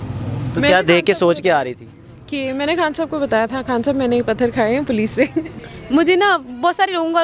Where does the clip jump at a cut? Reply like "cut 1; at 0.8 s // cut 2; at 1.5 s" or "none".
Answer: cut 1; at 5.6 s